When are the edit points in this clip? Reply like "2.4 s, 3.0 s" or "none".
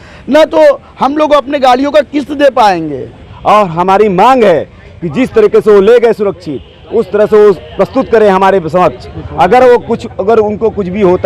3.3 s

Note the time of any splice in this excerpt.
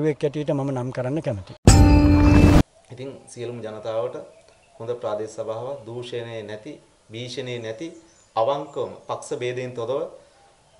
1.5 s, 2.6 s

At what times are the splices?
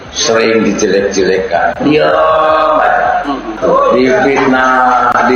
3.4 s

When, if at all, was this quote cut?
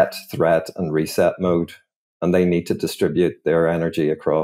none

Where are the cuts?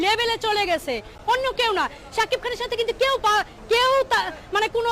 1.1 s

